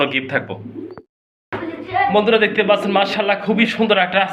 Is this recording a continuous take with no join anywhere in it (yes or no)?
yes